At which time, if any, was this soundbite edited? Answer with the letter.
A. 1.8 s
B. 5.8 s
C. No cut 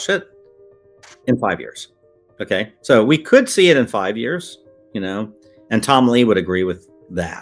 C